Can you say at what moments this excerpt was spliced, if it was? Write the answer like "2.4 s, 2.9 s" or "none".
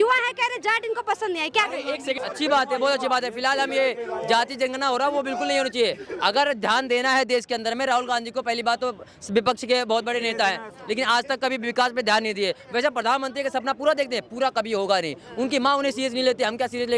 2.2 s